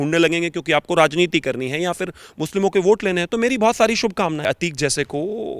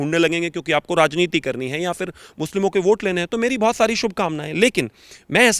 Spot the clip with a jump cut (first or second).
first